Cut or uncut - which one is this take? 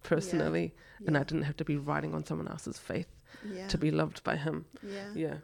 uncut